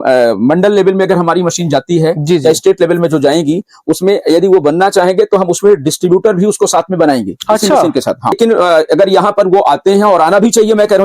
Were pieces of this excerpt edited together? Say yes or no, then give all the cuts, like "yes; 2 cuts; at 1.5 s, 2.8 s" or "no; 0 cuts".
yes; 1 cut; at 8.4 s